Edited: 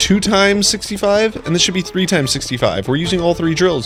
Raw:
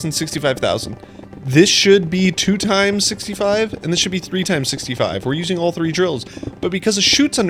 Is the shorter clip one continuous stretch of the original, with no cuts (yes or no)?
yes